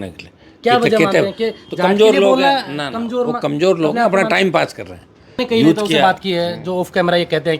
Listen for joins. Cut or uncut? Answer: cut